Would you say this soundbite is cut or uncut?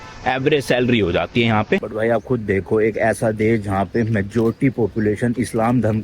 cut